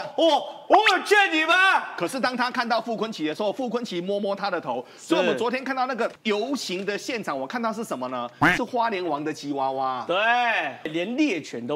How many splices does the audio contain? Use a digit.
2